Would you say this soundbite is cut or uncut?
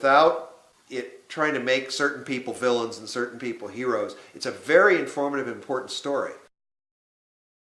cut